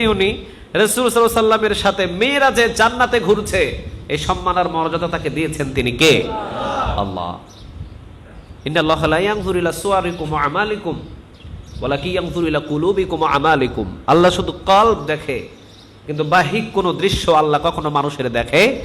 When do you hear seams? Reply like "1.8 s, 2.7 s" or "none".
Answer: none